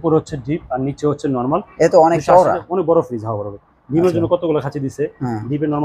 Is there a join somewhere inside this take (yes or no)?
no